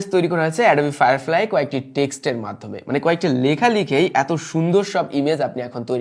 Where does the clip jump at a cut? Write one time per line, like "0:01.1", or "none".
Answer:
none